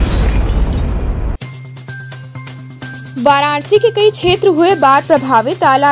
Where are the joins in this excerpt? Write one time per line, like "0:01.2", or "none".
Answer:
0:02.7

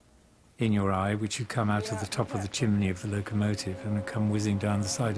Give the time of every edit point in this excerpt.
none

